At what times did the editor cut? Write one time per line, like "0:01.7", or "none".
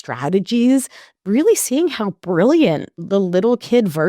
0:01.1
0:03.0